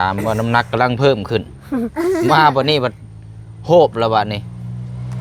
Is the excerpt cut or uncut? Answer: uncut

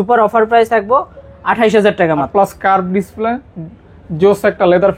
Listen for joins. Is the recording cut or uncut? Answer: cut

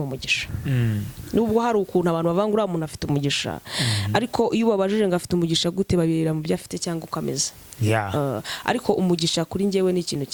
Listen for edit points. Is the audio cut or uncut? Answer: uncut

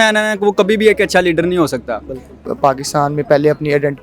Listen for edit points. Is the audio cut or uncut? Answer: cut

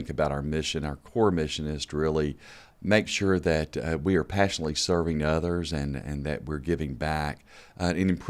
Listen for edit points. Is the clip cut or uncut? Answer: uncut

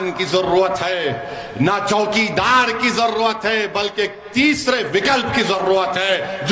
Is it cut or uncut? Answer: uncut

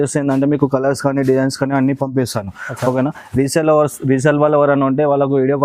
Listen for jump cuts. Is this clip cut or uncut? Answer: uncut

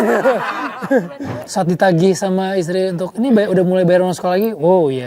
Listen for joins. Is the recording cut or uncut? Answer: cut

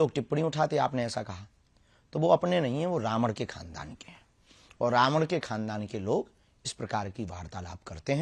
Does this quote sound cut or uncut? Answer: uncut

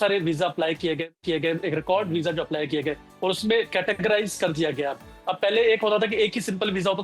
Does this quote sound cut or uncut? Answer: uncut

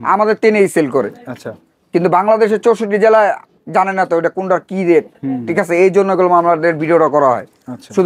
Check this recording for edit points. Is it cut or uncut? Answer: uncut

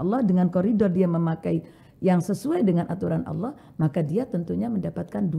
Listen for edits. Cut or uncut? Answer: uncut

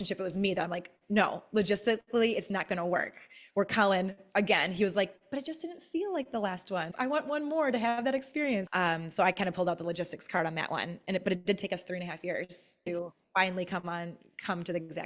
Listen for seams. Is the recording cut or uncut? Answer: cut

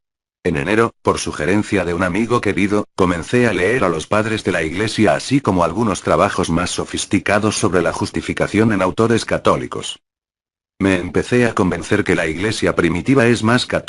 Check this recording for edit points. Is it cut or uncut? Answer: cut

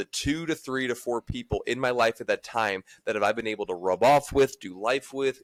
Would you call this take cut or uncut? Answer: uncut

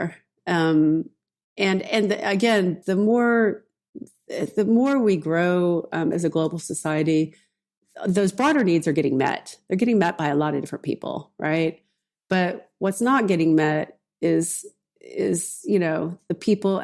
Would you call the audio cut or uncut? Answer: uncut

